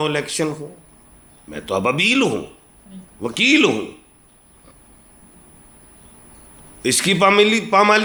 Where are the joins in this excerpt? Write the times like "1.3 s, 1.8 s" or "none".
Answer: none